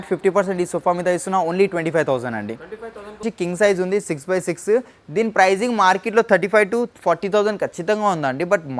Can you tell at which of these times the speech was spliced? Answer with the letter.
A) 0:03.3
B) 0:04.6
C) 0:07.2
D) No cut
A